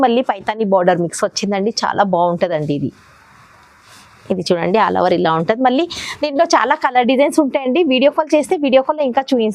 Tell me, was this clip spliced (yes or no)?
no